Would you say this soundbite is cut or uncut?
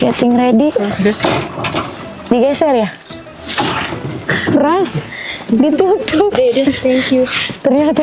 cut